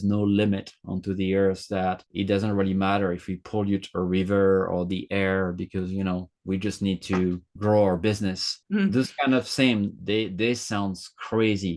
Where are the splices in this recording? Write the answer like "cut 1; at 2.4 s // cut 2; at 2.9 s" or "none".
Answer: none